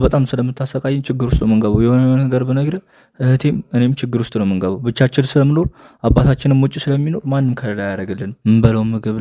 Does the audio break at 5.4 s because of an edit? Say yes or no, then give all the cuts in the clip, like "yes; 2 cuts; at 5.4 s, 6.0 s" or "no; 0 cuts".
no; 1 cut; at 8.3 s